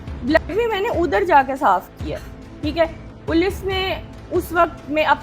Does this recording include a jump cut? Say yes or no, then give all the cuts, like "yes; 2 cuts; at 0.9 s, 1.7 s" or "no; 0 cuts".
no; 0 cuts